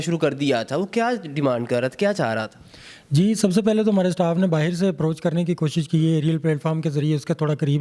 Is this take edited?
no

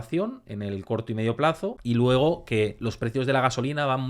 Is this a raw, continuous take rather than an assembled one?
no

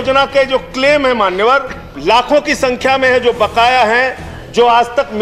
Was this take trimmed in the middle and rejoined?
yes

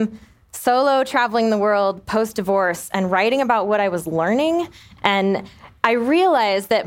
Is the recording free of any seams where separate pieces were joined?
no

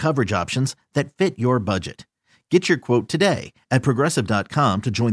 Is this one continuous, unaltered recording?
yes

